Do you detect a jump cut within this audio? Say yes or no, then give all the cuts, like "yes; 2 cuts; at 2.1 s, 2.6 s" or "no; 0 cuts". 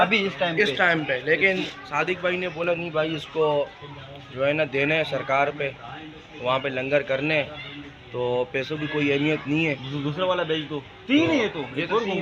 no; 0 cuts